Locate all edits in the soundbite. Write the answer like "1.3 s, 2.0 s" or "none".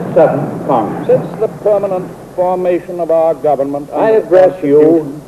3.9 s